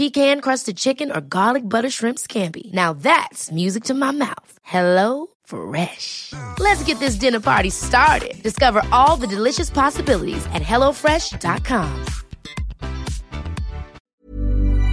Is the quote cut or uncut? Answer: cut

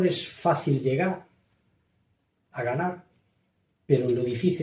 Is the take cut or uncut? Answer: uncut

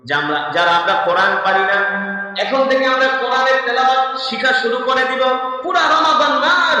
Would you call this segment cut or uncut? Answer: cut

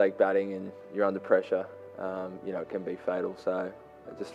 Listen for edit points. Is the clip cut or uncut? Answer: uncut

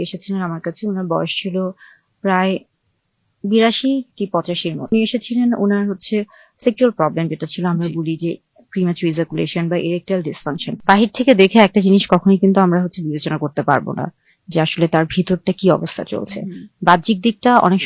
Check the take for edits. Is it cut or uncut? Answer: cut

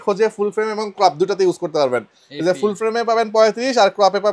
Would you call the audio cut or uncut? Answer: uncut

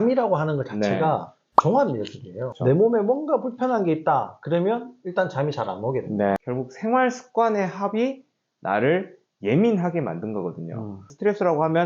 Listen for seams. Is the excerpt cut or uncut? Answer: cut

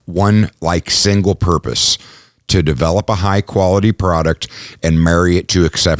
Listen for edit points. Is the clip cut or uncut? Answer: uncut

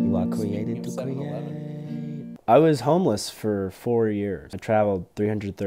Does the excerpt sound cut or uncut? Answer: cut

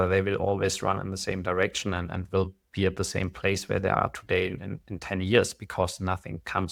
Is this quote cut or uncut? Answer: uncut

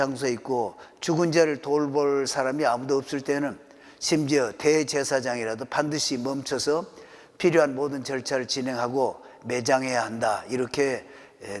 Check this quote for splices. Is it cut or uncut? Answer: uncut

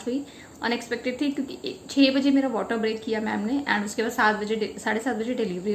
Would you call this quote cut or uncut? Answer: uncut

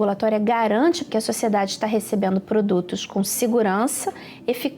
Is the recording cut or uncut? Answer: cut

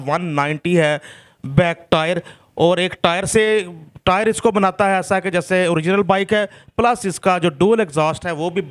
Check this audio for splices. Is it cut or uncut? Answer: uncut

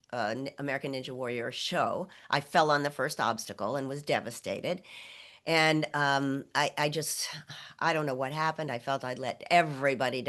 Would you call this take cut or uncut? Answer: uncut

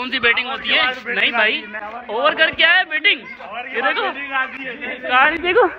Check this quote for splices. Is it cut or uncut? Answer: uncut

